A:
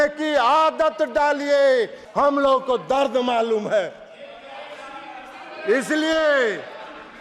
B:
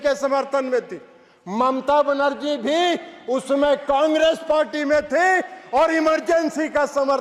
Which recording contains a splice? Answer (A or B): A